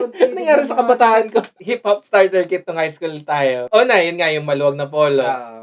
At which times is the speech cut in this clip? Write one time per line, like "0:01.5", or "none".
0:01.6
0:03.6